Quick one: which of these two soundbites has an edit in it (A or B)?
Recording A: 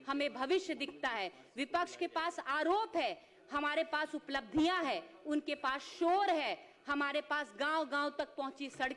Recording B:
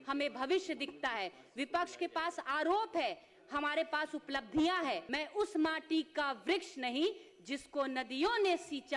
B